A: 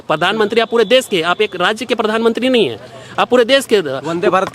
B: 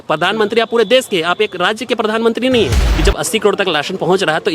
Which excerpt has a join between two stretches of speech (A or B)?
B